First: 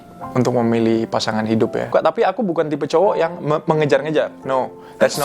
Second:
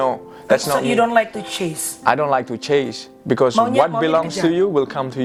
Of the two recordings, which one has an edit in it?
first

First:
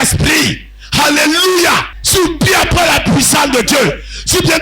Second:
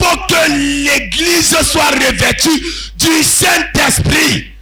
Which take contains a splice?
first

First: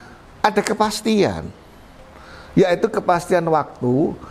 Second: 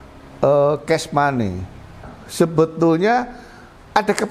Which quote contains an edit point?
second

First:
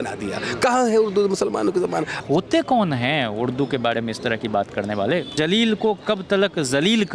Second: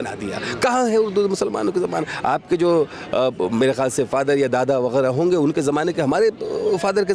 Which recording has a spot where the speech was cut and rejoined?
first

